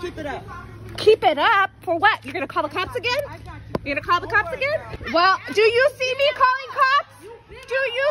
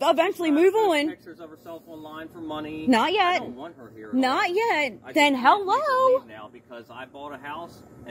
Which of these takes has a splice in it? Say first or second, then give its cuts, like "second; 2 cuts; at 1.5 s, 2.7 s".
first; 1 cut; at 5.0 s